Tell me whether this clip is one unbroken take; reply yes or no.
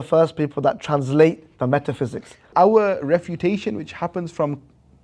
no